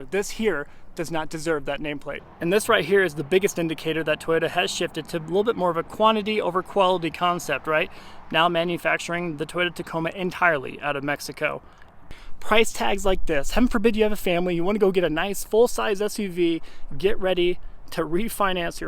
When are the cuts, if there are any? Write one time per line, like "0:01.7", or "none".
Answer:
0:02.2
0:12.2